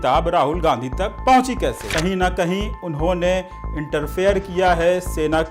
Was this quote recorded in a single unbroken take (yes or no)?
no